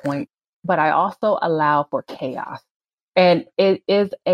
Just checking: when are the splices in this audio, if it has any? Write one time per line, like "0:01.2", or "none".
none